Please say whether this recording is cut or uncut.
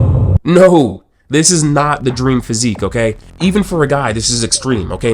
uncut